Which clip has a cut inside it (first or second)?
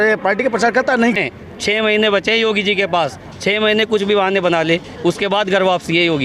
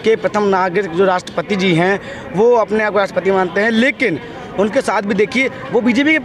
first